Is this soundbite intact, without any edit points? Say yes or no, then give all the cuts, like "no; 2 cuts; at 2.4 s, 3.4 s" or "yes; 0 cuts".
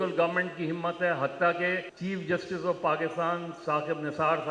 no; 1 cut; at 1.9 s